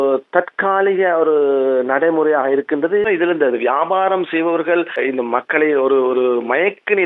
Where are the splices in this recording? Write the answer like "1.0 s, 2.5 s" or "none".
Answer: 3.1 s, 5.0 s